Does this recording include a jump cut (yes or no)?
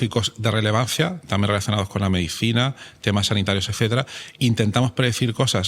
no